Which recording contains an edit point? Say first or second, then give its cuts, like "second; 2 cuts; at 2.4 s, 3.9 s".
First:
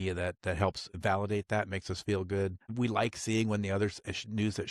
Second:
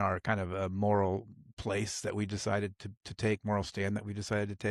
first; 2 cuts; at 0.9 s, 2.6 s